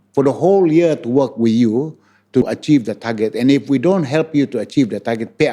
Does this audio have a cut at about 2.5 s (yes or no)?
yes